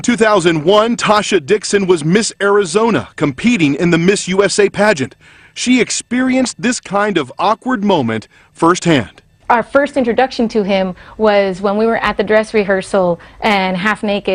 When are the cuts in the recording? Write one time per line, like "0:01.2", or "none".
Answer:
0:13.3